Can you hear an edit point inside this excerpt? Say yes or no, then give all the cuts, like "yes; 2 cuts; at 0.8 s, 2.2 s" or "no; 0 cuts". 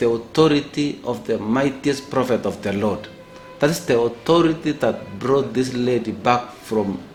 no; 0 cuts